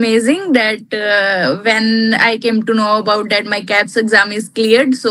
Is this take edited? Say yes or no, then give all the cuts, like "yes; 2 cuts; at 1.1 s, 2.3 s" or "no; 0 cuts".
no; 0 cuts